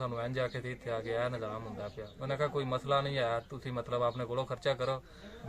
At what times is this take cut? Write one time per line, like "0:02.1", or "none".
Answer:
none